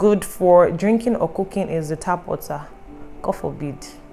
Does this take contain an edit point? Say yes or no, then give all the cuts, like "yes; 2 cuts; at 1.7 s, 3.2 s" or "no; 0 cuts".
no; 0 cuts